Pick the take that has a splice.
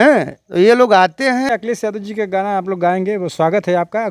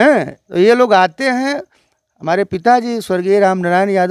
first; 1 cut; at 1.5 s

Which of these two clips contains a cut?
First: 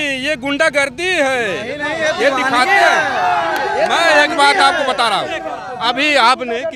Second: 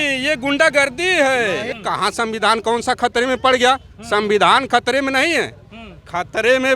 second; 1 cut; at 1.7 s

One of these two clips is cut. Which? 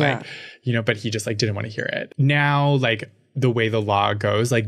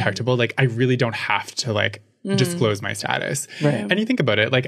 first; 1 cut; at 1.0 s

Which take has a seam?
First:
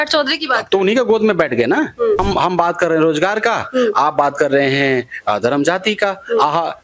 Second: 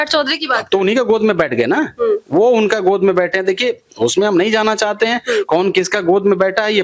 first; 1 cut; at 2.2 s

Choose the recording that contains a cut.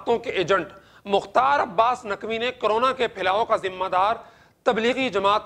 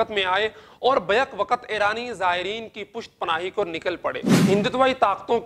second; 1 cut; at 4.3 s

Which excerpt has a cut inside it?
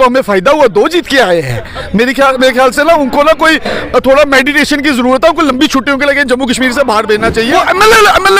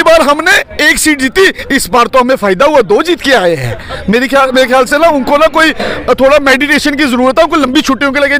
first; 1 cut; at 7.5 s

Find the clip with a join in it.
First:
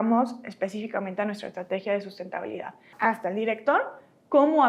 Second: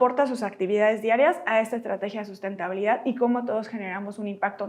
first; 1 cut; at 2.9 s

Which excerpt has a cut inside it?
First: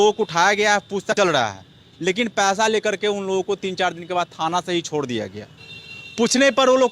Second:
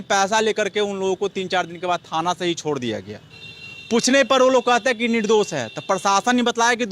first; 1 cut; at 1.1 s

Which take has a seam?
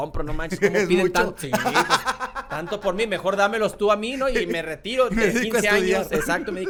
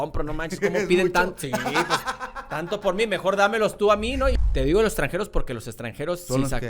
second; 1 cut; at 4.3 s

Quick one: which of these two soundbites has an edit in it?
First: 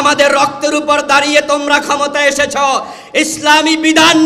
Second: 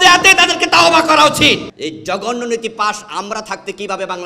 second; 1 cut; at 1.7 s

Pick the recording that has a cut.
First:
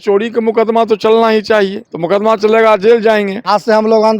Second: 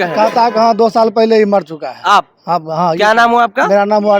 first; 2 cuts; at 1.9 s, 3.4 s

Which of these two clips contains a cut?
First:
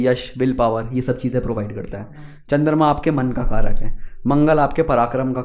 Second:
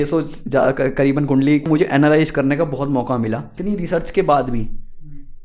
second; 2 cuts; at 1.7 s, 3.5 s

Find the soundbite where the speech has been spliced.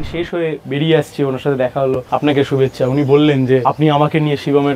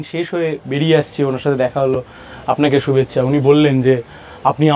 first; 2 cuts; at 2.0 s, 3.6 s

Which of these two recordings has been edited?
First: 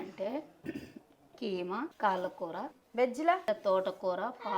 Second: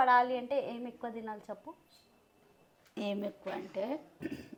first; 3 cuts; at 1.9 s, 2.8 s, 3.5 s

